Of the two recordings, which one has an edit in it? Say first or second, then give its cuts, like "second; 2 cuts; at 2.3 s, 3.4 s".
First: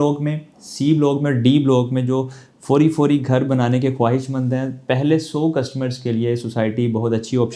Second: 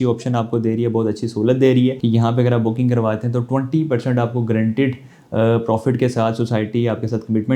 second; 1 cut; at 2.0 s